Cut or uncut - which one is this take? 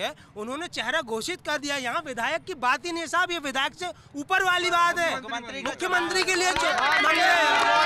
uncut